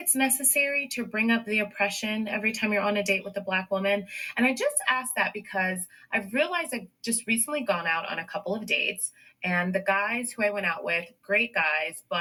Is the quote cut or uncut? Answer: uncut